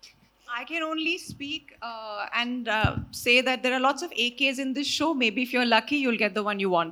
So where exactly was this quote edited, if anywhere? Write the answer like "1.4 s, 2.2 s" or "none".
none